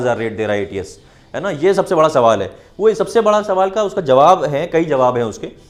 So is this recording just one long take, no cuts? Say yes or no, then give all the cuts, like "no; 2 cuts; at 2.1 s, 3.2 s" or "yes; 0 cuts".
yes; 0 cuts